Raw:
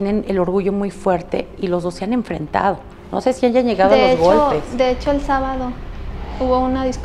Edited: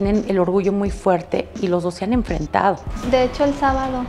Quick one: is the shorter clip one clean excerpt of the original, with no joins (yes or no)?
no